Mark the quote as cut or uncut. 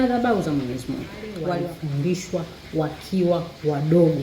cut